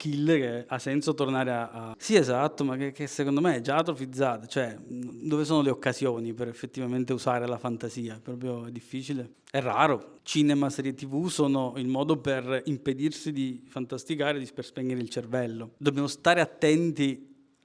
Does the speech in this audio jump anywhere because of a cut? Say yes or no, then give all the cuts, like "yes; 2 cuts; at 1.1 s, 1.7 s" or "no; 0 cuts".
yes; 4 cuts; at 1.9 s, 9.4 s, 10.2 s, 15.7 s